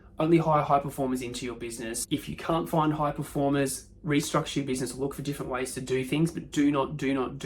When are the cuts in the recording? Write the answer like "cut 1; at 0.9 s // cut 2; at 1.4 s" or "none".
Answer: cut 1; at 2.0 s